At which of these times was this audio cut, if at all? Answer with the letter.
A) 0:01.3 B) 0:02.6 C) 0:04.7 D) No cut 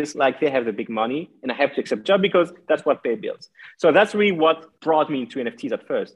C